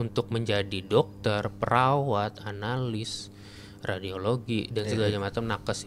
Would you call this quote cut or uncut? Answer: uncut